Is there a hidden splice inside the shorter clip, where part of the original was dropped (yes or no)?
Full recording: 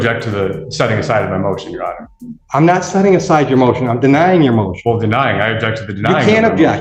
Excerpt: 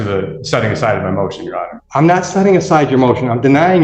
yes